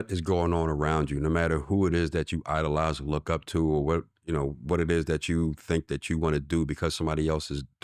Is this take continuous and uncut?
yes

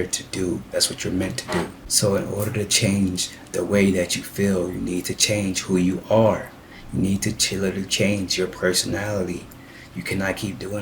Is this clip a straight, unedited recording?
no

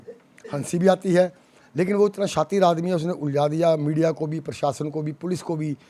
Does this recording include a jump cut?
no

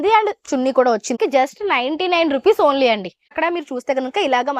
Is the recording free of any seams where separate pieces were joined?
no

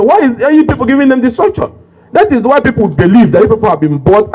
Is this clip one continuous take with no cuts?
yes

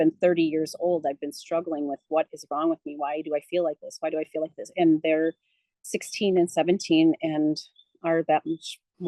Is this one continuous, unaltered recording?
yes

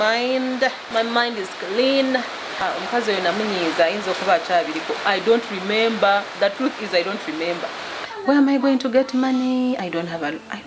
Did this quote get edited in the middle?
yes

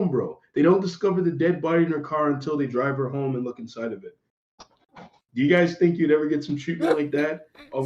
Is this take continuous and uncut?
yes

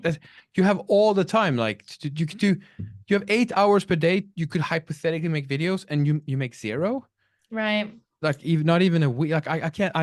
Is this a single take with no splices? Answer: yes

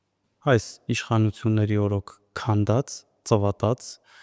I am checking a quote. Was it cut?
no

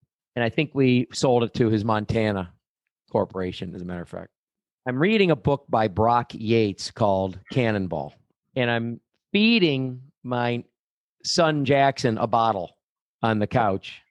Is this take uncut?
yes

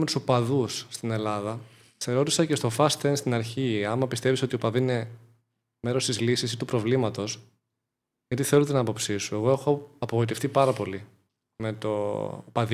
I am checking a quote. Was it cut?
no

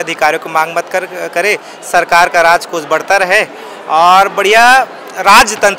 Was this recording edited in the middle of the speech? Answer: no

